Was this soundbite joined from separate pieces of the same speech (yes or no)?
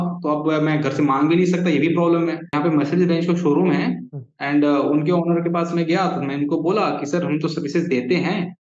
yes